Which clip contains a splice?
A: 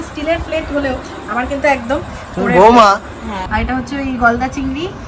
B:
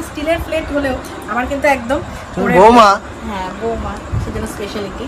A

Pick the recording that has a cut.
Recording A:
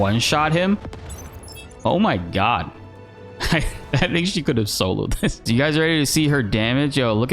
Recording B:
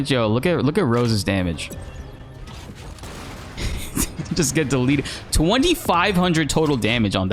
A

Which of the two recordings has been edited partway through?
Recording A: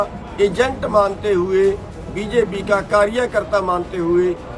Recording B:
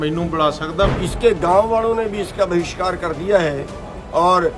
B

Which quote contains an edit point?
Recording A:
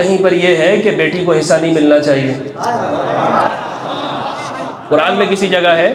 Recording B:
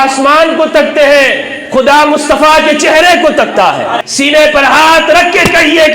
B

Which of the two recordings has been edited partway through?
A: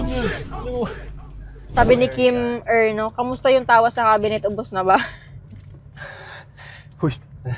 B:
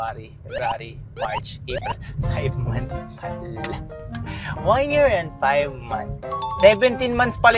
A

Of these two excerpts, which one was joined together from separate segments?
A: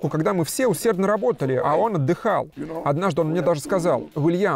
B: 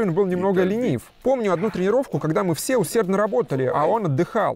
B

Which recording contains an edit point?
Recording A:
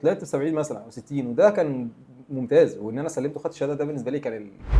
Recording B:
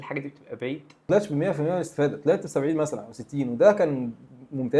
B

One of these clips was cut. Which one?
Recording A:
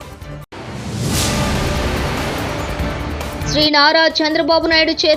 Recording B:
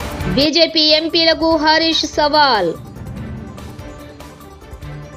A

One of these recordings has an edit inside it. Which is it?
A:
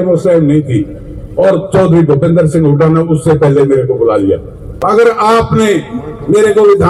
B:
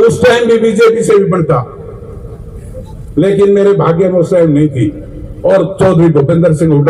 A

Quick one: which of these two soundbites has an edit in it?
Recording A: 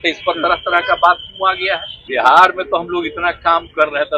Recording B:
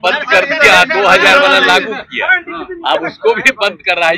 A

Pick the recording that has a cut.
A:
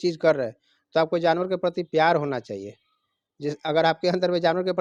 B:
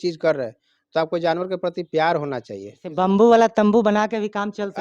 B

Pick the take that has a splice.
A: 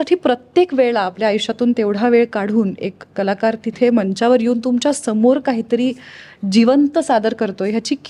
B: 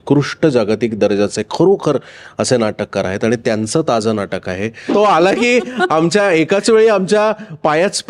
B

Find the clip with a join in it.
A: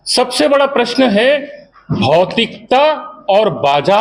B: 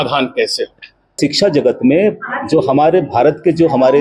B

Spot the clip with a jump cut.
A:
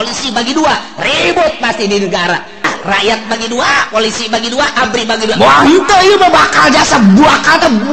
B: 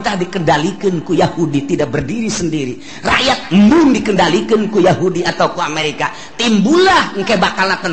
A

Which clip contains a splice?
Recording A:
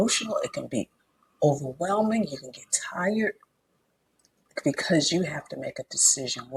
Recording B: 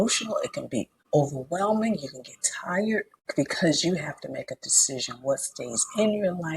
B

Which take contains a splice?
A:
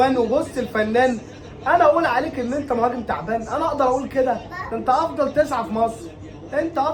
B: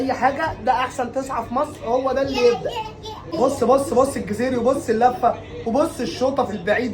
B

